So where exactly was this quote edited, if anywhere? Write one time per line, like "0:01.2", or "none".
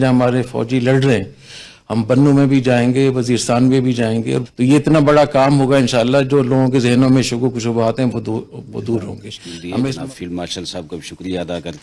0:09.9